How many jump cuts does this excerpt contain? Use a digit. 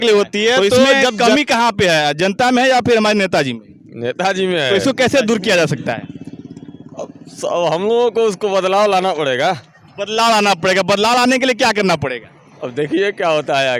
2